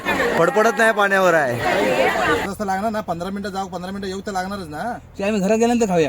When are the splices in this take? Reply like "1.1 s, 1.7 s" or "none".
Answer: 2.5 s